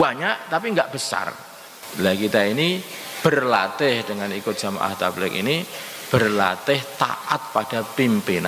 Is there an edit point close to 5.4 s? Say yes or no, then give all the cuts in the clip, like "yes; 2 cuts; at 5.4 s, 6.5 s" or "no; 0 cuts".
no; 1 cut; at 1.8 s